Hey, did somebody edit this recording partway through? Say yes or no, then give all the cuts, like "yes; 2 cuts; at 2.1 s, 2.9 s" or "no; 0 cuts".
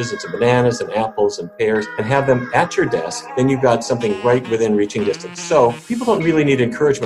yes; 3 cuts; at 1.9 s, 3.2 s, 5.8 s